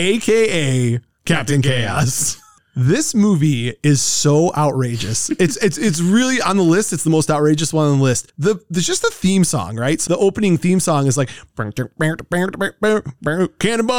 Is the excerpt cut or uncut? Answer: cut